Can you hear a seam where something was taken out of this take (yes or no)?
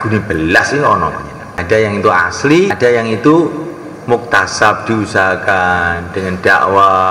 yes